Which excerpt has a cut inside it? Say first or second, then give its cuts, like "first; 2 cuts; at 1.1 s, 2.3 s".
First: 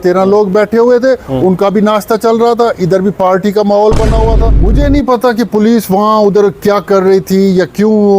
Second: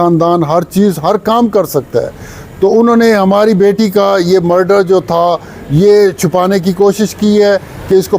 first; 1 cut; at 4.6 s